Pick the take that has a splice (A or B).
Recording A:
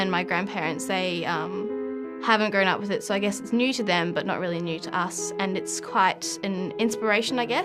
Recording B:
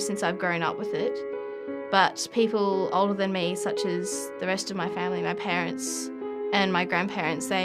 B